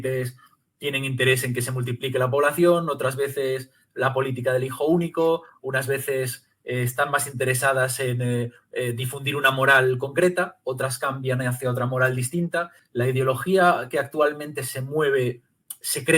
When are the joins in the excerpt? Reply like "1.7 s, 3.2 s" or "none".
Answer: 12.8 s